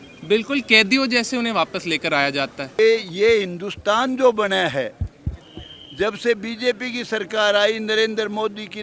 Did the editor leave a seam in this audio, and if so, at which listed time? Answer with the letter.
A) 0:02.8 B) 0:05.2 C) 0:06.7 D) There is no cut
A